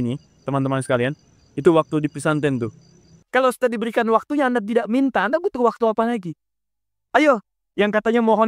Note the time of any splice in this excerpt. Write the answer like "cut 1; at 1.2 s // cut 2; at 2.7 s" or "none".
cut 1; at 3.1 s

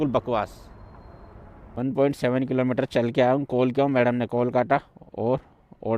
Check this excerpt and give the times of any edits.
cut 1; at 1.8 s

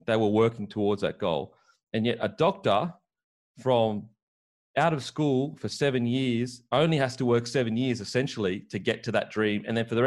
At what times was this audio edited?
none

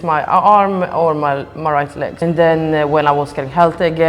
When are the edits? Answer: cut 1; at 2.2 s

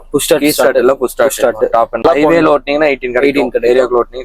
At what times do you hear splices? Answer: cut 1; at 2.0 s

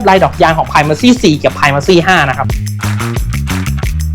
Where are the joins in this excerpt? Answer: cut 1; at 2.4 s

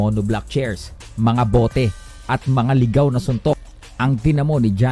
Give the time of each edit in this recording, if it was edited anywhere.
none

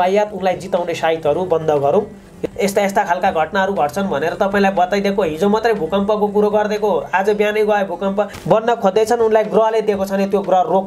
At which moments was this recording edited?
cut 1; at 2.4 s // cut 2; at 8.4 s

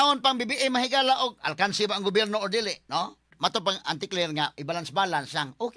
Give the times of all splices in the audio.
cut 1; at 3.3 s

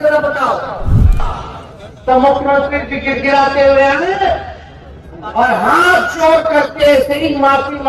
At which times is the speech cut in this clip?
cut 1; at 1.2 s

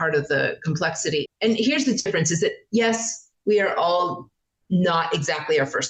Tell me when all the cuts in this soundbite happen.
cut 1; at 1.2 s

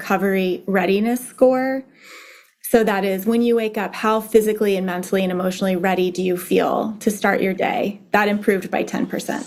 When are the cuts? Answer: none

